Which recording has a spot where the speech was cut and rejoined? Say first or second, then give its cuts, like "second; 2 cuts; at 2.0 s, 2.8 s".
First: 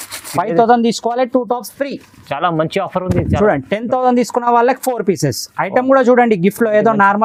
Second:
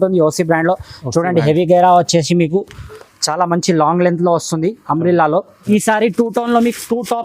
second; 1 cut; at 5.6 s